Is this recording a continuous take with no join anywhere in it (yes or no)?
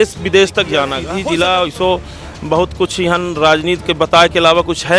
no